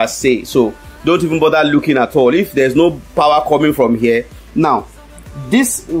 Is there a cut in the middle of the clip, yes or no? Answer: yes